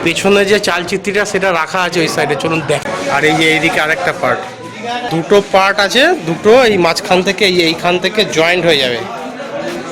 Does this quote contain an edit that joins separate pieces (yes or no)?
yes